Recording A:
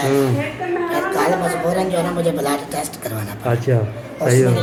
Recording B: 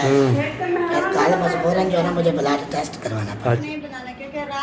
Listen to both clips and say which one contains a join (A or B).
B